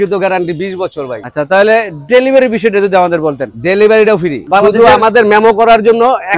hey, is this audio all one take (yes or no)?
no